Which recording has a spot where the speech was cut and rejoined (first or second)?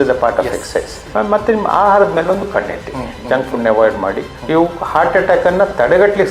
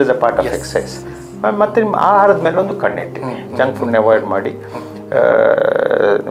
first